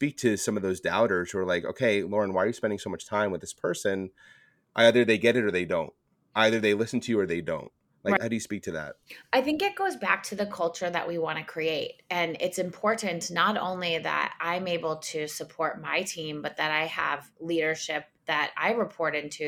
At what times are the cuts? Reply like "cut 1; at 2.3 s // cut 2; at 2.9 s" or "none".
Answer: none